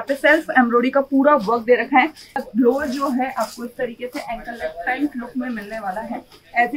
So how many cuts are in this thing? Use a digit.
1